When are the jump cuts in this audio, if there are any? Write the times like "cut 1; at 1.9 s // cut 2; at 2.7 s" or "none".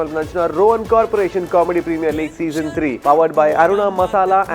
cut 1; at 3.0 s